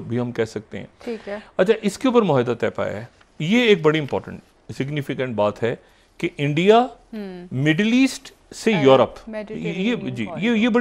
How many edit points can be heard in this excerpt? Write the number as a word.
zero